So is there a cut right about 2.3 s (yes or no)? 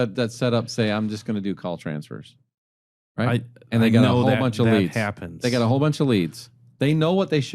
no